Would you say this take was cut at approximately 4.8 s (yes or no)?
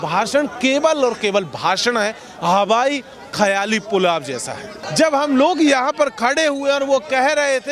yes